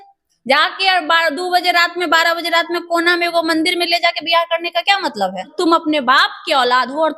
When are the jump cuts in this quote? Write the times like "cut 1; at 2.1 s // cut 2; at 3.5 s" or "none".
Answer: cut 1; at 5.5 s